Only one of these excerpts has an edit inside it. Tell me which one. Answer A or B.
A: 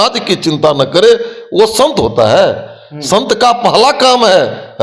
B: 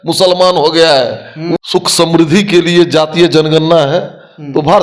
B